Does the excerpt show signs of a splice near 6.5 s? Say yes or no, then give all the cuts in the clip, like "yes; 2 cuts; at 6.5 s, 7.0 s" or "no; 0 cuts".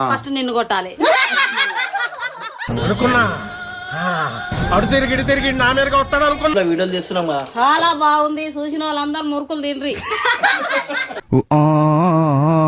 yes; 1 cut; at 6.5 s